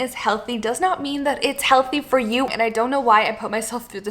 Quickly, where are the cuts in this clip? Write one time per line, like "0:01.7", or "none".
0:02.5